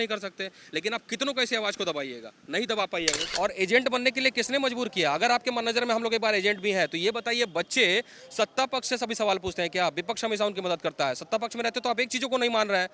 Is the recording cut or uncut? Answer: cut